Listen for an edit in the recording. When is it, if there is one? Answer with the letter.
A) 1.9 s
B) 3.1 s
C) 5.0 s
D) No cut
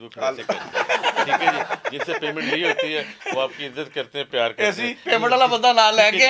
C